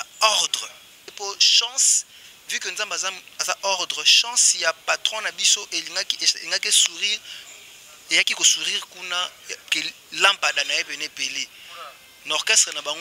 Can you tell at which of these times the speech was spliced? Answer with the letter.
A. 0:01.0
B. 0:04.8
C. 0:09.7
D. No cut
A